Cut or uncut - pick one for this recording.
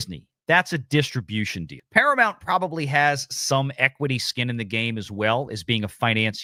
uncut